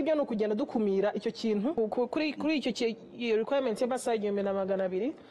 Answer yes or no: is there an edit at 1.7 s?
yes